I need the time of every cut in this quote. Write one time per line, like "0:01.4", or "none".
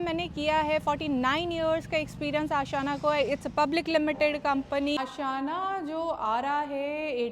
0:05.0